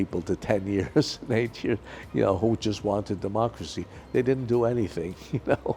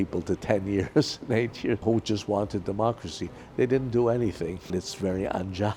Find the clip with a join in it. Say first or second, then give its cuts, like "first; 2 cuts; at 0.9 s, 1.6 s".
second; 2 cuts; at 1.8 s, 4.7 s